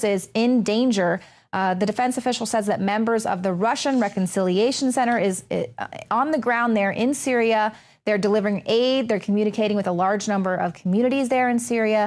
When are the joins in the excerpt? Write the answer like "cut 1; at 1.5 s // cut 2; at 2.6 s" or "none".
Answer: cut 1; at 7.7 s